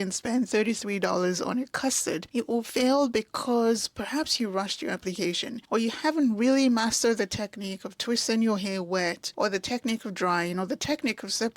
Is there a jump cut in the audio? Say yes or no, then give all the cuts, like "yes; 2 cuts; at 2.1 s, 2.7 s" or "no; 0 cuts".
yes; 3 cuts; at 2.3 s, 5.6 s, 9.2 s